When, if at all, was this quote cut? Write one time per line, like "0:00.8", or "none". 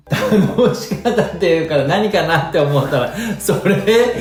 none